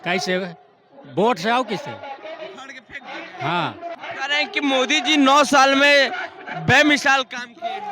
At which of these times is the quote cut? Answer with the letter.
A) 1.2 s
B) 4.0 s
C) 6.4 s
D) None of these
B